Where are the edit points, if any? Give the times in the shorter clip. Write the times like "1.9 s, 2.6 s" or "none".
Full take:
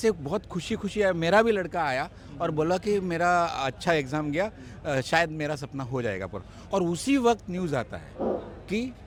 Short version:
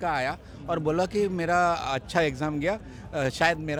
none